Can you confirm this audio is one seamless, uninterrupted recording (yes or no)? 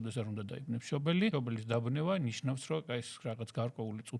no